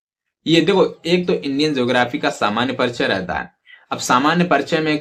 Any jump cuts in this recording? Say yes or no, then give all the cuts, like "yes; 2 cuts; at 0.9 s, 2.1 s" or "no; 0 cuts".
no; 0 cuts